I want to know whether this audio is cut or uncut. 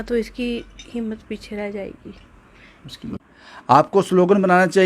cut